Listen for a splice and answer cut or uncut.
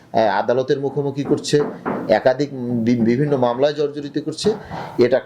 uncut